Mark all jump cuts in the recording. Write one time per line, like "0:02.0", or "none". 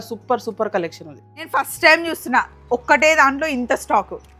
0:01.5